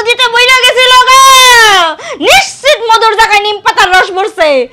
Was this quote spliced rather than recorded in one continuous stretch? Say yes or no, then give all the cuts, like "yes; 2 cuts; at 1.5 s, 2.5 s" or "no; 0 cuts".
no; 0 cuts